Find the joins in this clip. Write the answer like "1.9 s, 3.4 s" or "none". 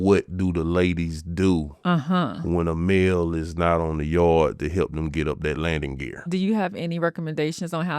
6.2 s